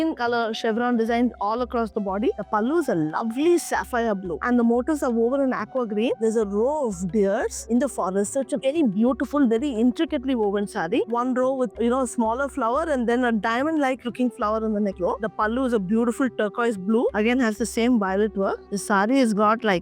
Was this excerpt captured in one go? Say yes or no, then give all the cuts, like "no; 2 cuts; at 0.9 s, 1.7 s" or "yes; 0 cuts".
no; 6 cuts; at 2.4 s, 4.4 s, 6.2 s, 11.1 s, 15.2 s, 18.7 s